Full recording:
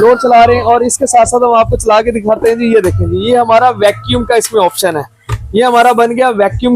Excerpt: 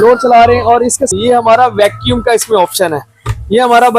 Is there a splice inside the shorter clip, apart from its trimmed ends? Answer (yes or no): yes